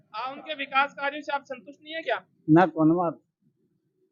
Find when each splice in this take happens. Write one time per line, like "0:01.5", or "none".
none